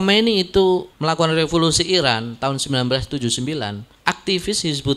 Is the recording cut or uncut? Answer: cut